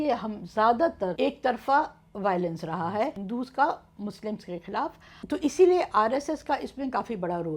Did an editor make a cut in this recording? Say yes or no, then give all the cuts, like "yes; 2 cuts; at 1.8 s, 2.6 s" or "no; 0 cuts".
yes; 3 cuts; at 1.1 s, 3.2 s, 5.1 s